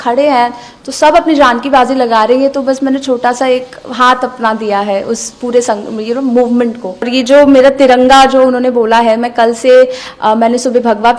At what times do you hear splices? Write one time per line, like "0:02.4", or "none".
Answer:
0:07.1